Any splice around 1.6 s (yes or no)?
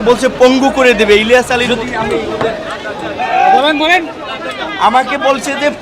yes